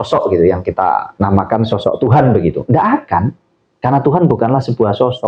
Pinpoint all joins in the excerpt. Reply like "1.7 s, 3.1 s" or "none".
1.1 s